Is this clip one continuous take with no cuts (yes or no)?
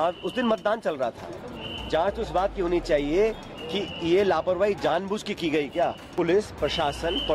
no